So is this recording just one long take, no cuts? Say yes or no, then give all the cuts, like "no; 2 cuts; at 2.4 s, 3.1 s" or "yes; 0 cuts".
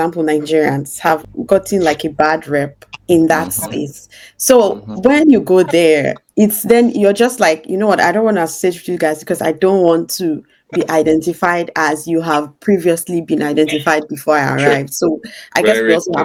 yes; 0 cuts